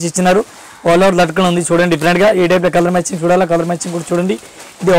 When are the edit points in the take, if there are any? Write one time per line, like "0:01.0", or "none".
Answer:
none